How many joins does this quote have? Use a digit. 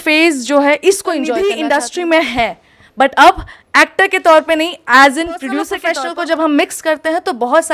2